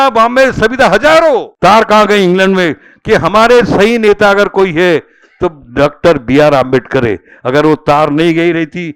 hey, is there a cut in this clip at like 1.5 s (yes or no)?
yes